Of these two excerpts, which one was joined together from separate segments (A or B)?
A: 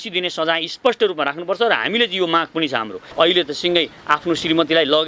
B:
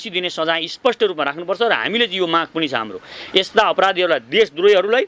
A